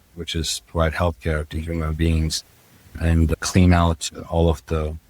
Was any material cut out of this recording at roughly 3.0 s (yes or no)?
yes